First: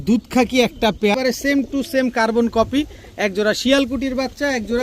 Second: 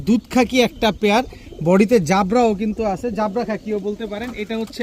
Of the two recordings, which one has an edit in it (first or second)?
first